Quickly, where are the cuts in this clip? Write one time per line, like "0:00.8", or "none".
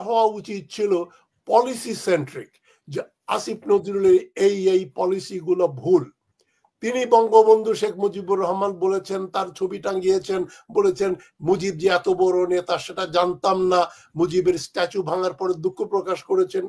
none